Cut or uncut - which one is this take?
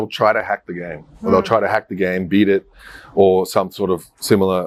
uncut